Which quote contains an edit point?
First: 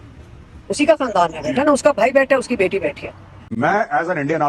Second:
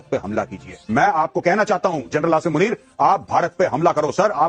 first; 1 cut; at 3.5 s

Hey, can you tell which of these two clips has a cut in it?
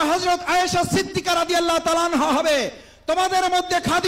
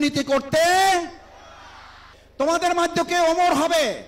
second; 1 cut; at 2.1 s

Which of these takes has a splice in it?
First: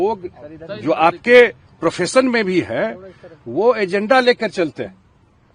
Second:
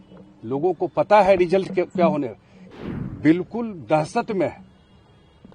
second; 1 cut; at 2.7 s

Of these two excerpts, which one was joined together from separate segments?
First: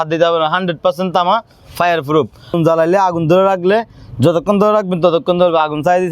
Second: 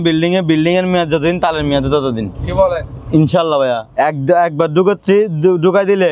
first; 1 cut; at 2.5 s

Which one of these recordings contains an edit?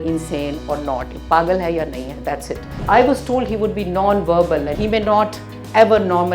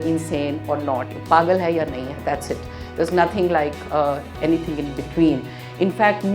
first; 2 cuts; at 2.7 s, 4.7 s

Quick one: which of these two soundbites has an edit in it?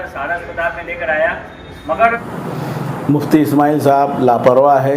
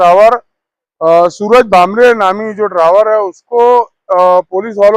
first; 1 cut; at 2.2 s

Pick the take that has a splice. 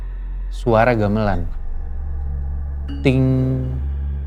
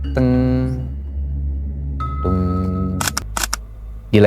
second; 1 cut; at 3.1 s

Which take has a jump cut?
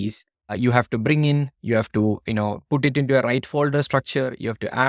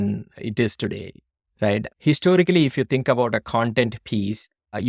second; 1 cut; at 1.9 s

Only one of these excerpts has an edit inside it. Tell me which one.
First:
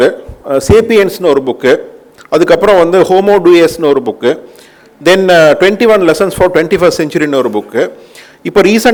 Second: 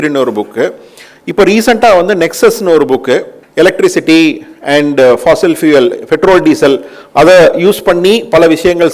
second; 1 cut; at 3.4 s

